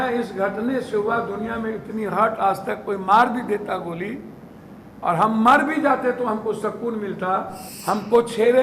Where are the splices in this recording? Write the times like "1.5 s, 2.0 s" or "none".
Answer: 7.7 s